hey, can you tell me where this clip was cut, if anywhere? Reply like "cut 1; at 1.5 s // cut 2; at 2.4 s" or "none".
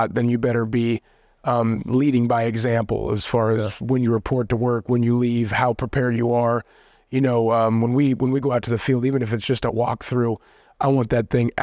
none